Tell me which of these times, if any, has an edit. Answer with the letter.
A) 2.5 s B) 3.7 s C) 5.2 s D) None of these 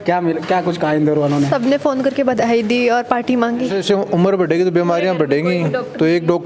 B